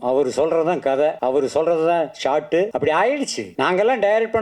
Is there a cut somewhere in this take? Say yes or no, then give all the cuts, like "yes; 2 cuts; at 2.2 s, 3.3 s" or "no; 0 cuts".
yes; 3 cuts; at 1.2 s, 2.7 s, 3.4 s